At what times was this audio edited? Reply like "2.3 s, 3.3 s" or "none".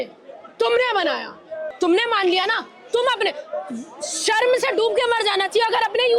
1.6 s